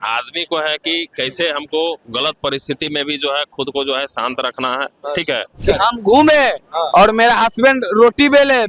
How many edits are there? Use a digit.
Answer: 1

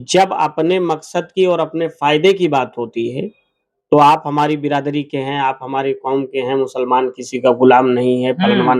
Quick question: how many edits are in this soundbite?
0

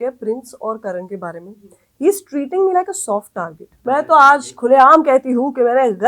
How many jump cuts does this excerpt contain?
1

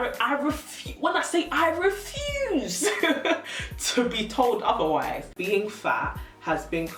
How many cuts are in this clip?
1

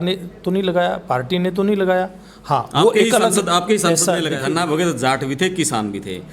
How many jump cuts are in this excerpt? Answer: 1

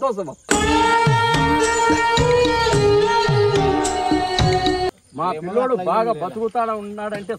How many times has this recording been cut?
1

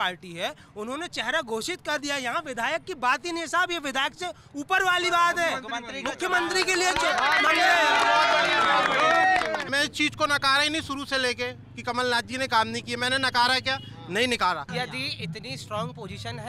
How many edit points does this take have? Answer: 2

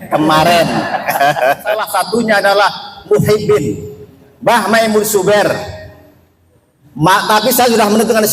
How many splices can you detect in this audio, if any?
1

